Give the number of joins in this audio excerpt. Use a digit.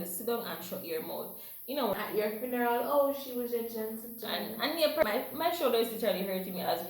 2